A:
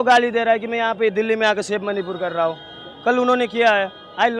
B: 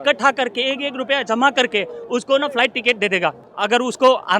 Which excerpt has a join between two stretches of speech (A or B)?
B